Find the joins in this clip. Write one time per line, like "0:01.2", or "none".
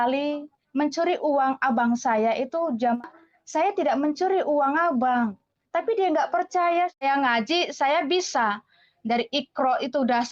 0:03.0
0:07.0